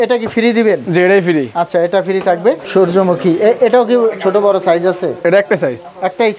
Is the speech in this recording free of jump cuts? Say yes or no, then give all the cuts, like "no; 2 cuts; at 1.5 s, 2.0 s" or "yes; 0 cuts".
no; 1 cut; at 2.6 s